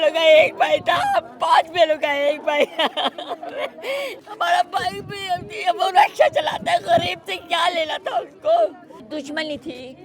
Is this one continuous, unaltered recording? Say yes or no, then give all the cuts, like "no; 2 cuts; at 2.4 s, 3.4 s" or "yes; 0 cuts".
no; 2 cuts; at 4.2 s, 9.0 s